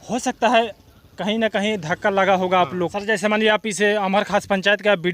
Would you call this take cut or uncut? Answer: cut